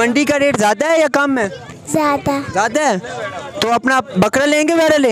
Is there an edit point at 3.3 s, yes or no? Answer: no